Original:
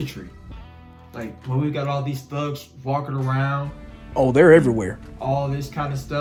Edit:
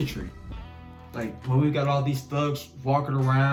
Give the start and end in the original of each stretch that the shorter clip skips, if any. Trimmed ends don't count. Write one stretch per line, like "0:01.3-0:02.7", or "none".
none